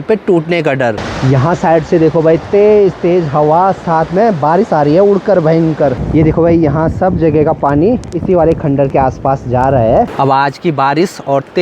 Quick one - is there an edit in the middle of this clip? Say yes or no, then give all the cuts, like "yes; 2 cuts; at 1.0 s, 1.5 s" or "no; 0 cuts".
yes; 3 cuts; at 1.1 s, 6.0 s, 10.1 s